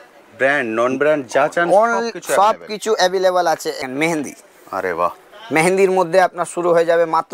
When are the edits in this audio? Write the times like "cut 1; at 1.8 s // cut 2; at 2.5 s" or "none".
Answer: cut 1; at 3.8 s